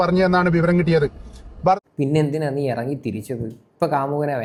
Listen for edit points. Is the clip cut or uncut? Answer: uncut